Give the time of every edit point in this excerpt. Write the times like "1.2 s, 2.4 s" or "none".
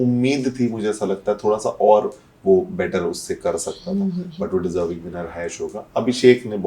none